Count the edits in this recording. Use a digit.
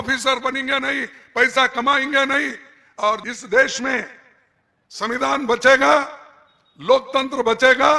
1